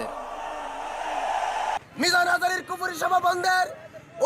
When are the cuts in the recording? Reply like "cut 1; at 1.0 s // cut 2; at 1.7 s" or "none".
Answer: cut 1; at 1.8 s